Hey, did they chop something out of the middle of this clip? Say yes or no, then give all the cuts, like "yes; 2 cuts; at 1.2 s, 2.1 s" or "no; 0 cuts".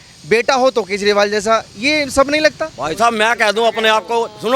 no; 0 cuts